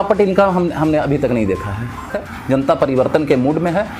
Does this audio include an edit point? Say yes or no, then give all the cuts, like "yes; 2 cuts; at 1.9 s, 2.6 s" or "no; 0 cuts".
yes; 1 cut; at 2.3 s